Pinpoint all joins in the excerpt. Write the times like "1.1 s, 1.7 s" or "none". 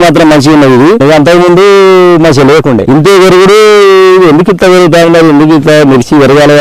1.0 s